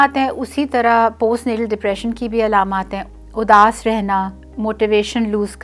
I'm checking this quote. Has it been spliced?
yes; 2 cuts; at 3.0 s, 4.4 s

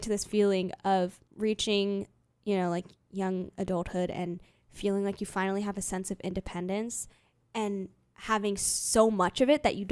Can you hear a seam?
yes; 1 cut; at 1.2 s

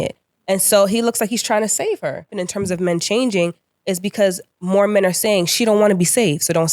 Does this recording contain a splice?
yes; 1 cut; at 2.4 s

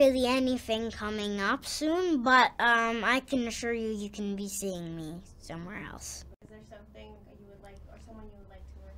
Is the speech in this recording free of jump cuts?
no; 1 cut; at 6.4 s

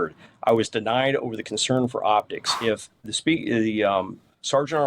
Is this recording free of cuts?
no; 1 cut; at 2.6 s

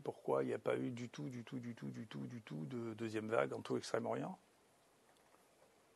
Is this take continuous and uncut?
yes; 0 cuts

